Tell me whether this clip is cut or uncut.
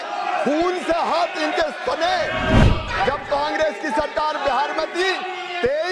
cut